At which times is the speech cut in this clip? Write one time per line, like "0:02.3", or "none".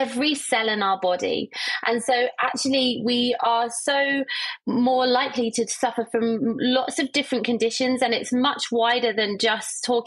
none